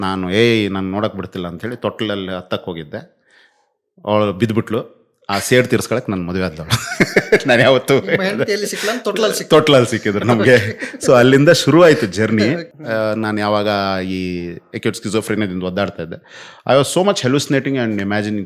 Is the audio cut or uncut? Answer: cut